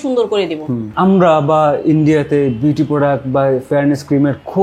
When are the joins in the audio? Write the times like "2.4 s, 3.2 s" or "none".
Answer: 0.9 s